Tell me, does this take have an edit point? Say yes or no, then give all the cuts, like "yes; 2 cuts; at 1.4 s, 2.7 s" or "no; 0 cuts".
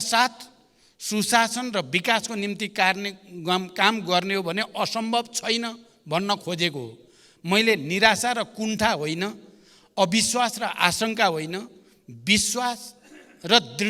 no; 0 cuts